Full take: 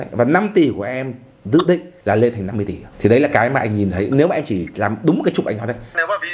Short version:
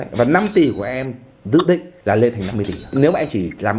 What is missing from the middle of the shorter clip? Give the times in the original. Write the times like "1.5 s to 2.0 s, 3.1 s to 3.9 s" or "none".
2.9 s to 4.0 s